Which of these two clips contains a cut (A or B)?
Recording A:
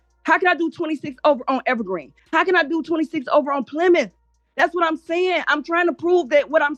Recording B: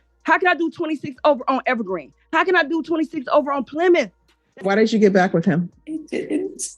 B